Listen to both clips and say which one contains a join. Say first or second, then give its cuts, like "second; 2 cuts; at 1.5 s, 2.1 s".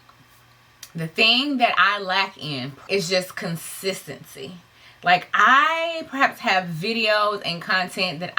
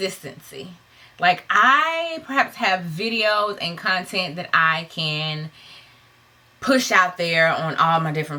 first; 1 cut; at 2.8 s